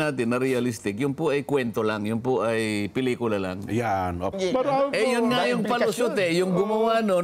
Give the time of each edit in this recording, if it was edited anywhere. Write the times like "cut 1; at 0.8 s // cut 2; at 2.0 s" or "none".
cut 1; at 4.3 s